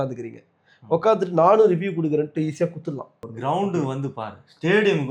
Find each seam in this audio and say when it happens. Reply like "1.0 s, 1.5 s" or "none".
3.3 s